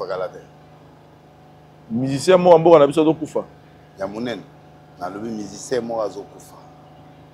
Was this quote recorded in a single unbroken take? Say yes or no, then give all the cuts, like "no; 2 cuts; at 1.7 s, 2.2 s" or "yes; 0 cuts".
no; 1 cut; at 4.6 s